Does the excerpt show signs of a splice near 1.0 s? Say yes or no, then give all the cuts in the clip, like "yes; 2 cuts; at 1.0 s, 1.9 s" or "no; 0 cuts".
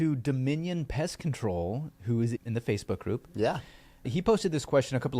no; 2 cuts; at 2.4 s, 4.1 s